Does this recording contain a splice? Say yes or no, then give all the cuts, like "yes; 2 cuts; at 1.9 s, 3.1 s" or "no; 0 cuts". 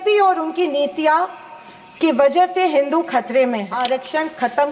yes; 1 cut; at 3.7 s